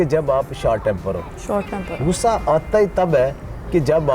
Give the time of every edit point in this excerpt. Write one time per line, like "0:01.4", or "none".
none